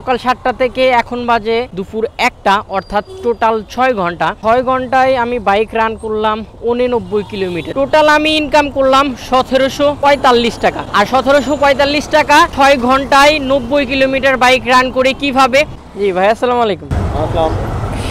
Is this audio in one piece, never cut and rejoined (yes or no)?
no